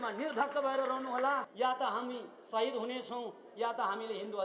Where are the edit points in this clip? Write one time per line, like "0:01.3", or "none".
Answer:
0:01.5